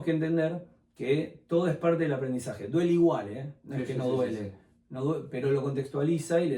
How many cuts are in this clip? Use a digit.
0